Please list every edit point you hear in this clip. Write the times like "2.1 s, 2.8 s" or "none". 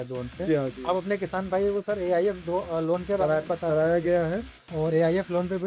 none